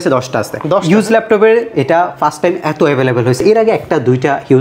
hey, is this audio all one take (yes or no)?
yes